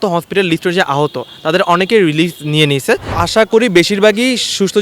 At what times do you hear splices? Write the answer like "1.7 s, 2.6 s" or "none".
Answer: 3.1 s